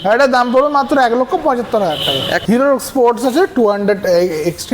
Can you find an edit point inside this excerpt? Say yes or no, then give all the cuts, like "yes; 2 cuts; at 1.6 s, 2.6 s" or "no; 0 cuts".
yes; 1 cut; at 2.3 s